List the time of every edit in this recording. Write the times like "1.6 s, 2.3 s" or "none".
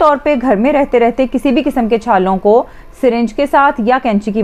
none